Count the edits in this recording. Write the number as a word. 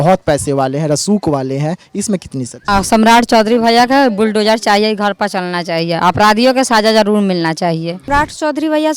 two